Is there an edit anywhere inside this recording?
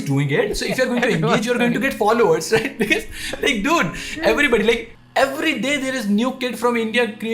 yes; 1 cut; at 4.9 s

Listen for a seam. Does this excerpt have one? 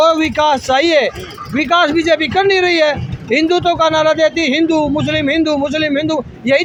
no; 0 cuts

